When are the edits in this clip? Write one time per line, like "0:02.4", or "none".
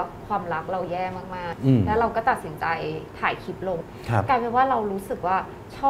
0:01.5
0:03.9